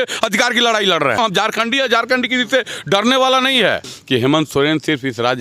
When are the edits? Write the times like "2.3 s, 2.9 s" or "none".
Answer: 1.2 s, 3.9 s